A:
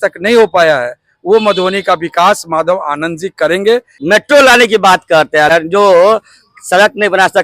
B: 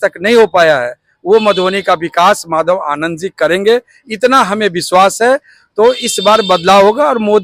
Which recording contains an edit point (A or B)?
A